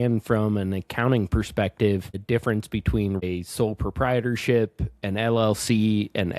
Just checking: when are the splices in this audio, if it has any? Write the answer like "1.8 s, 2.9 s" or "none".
2.2 s, 3.2 s